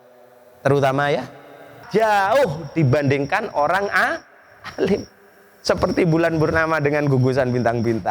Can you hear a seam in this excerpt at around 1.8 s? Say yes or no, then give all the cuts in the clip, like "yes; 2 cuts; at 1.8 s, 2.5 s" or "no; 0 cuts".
yes; 1 cut; at 1.8 s